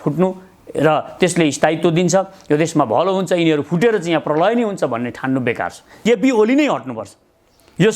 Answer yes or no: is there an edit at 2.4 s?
no